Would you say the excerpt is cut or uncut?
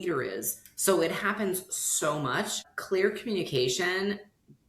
cut